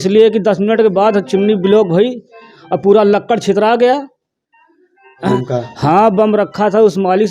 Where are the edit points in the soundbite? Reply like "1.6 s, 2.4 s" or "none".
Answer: 5.3 s